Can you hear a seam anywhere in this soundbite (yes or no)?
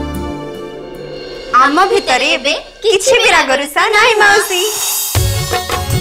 no